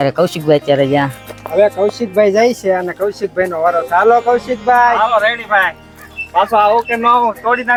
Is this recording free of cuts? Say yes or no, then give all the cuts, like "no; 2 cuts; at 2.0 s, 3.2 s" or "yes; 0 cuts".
yes; 0 cuts